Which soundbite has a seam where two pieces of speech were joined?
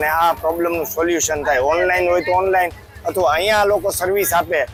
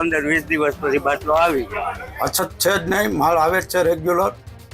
second; 1 cut; at 2.0 s

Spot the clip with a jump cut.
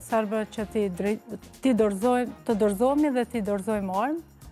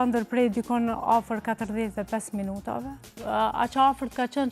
second; 1 cut; at 3.2 s

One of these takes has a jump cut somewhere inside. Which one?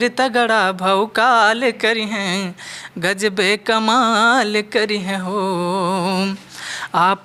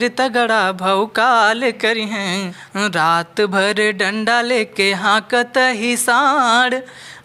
second; 1 cut; at 2.6 s

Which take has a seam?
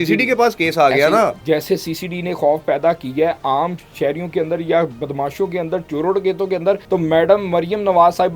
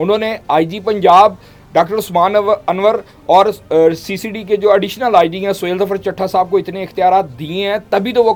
first; 2 cuts; at 1.4 s, 6.8 s

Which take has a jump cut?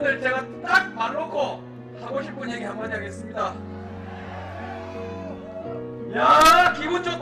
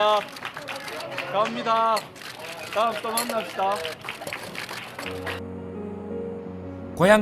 second; 1 cut; at 2.1 s

